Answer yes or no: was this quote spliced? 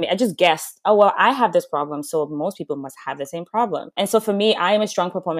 no